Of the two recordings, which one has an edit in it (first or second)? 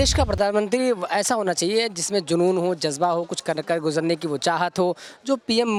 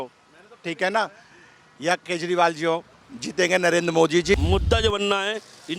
second